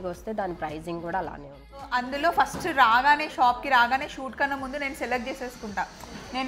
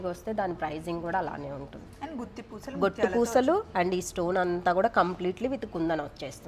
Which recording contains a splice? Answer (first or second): first